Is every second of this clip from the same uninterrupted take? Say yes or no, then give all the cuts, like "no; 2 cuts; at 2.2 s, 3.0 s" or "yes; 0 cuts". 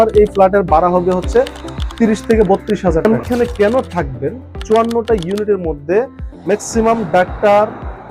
no; 2 cuts; at 3.3 s, 4.5 s